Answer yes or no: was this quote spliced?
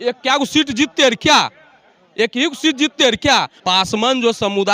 yes